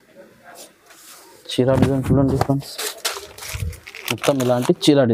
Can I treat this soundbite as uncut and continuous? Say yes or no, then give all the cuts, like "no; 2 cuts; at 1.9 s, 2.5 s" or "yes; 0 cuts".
yes; 0 cuts